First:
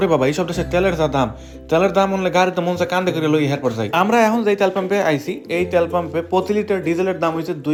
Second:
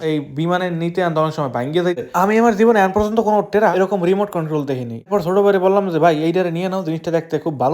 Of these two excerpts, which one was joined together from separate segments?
second; 3 cuts; at 2.0 s, 3.7 s, 5.1 s

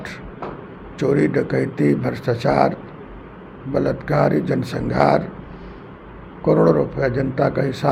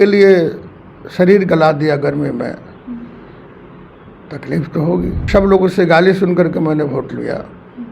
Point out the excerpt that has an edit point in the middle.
second; 1 cut; at 5.2 s

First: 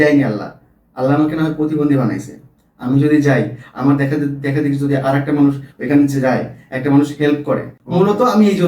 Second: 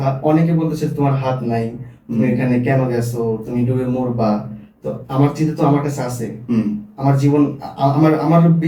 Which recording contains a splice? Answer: first; 1 cut; at 7.8 s

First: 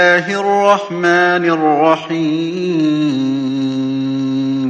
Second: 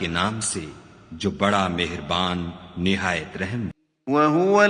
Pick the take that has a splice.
second; 1 cut; at 3.8 s

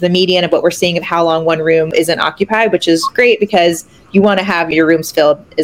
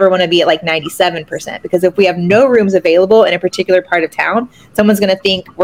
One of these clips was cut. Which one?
first; 2 cuts; at 1.9 s, 4.7 s

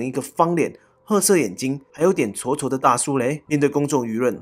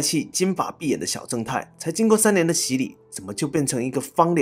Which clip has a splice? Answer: first; 2 cuts; at 1.8 s, 3.4 s

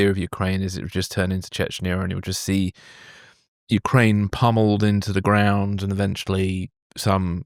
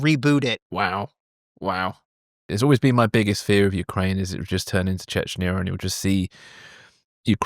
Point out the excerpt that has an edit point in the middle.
second; 1 cut; at 2.5 s

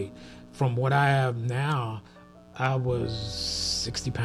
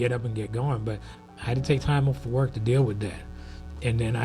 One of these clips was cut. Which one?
second; 1 cut; at 1.1 s

